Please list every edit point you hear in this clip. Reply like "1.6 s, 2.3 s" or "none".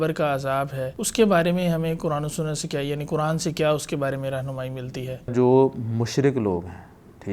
1.0 s, 5.3 s